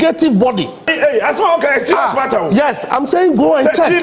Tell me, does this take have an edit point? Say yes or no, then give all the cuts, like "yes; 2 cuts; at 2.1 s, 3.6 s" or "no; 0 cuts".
yes; 1 cut; at 0.9 s